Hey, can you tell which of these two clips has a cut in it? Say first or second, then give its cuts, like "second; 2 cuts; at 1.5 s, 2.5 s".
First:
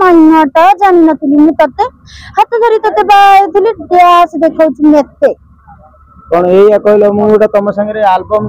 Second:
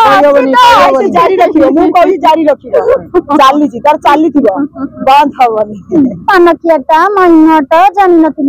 second; 1 cut; at 6.2 s